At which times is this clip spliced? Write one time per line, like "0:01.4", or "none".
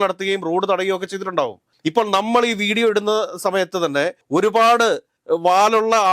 0:01.7
0:04.2
0:05.1

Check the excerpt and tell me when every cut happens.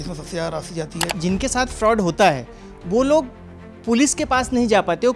0:01.1

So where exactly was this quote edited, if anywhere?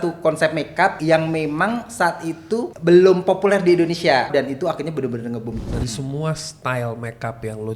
0:01.0
0:02.7
0:04.3
0:05.6

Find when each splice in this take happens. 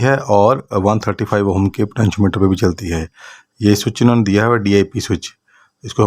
none

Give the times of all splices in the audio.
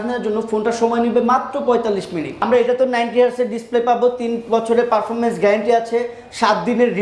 0:02.4

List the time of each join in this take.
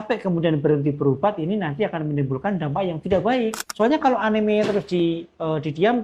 0:03.6

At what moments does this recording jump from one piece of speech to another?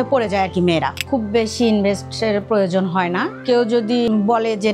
0:01.0

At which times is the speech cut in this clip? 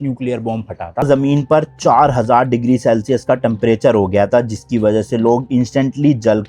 0:01.1

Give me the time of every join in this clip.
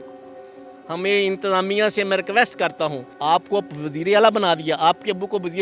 0:03.1

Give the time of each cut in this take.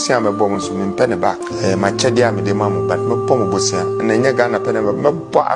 0:01.5

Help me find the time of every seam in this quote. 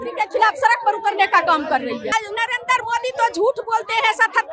0:02.1

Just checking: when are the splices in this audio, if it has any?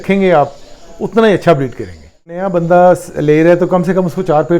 0:02.4

